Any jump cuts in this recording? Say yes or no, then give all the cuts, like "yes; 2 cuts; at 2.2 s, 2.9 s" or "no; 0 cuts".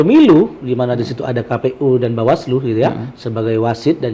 no; 0 cuts